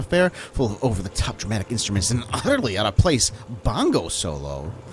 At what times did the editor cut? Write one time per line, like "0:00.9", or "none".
none